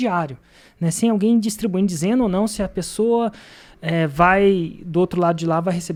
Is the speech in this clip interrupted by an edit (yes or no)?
no